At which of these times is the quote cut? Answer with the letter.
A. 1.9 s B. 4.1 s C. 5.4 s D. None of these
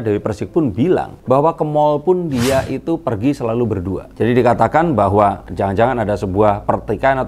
D